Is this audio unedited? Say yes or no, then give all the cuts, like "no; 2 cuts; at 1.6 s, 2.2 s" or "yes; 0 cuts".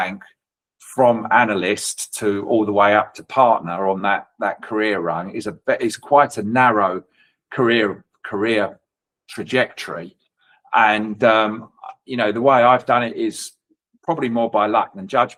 yes; 0 cuts